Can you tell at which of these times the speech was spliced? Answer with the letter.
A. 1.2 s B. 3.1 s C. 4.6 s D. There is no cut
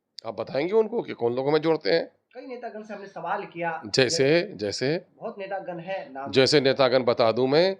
D